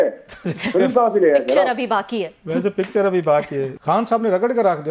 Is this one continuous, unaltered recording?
no; 1 cut; at 3.7 s

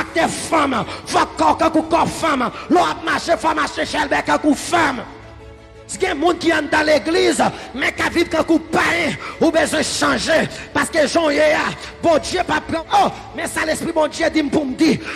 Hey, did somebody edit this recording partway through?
yes; 2 cuts; at 5.8 s, 12.8 s

